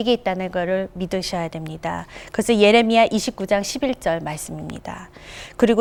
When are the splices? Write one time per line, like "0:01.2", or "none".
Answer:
none